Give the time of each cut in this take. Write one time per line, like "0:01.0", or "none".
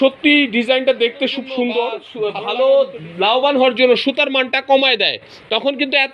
0:02.0